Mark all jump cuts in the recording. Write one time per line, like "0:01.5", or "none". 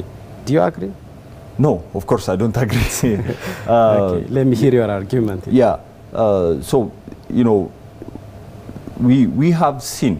none